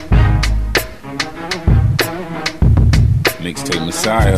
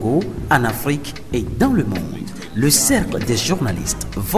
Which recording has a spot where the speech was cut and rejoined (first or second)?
first